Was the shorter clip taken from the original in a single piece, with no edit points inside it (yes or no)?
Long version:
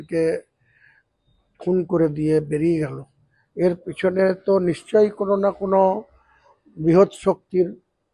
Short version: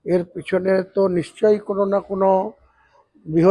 yes